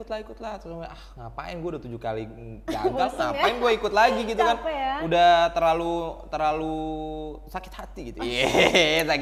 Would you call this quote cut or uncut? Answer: uncut